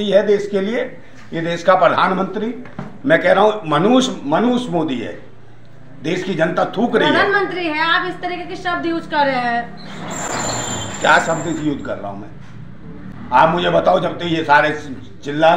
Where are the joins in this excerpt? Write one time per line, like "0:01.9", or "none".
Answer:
none